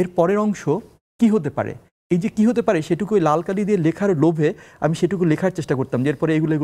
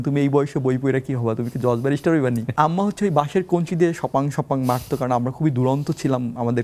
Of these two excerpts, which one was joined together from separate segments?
second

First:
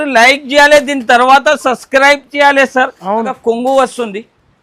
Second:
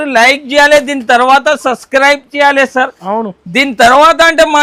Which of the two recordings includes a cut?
first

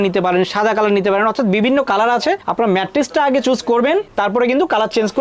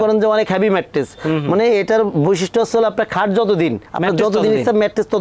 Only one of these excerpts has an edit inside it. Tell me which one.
first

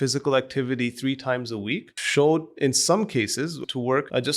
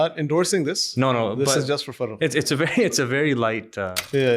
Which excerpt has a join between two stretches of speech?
first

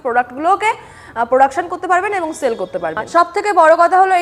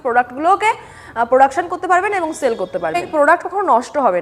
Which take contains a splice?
second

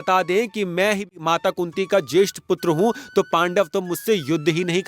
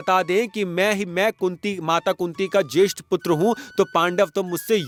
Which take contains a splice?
first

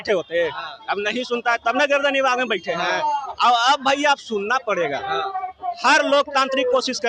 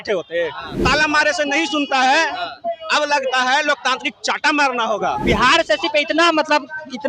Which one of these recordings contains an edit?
second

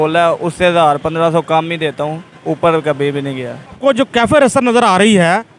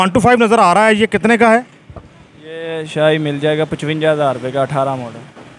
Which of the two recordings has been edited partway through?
first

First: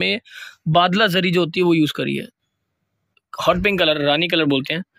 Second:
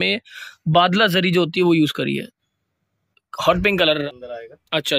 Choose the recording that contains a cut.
second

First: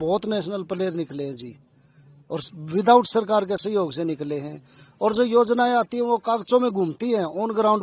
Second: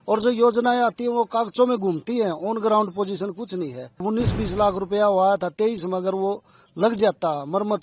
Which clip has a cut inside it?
second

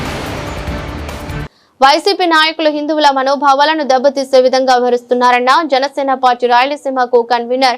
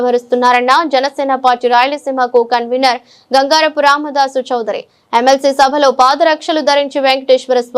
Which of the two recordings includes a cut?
first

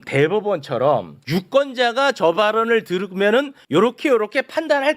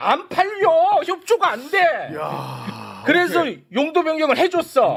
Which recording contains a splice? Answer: first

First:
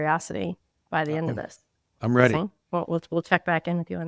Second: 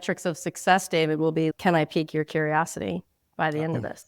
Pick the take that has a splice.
second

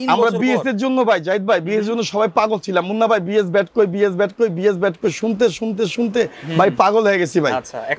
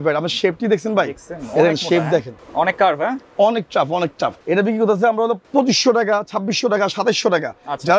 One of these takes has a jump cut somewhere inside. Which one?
second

